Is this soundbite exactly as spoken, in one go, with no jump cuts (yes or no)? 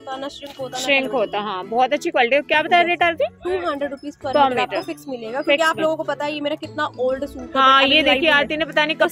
yes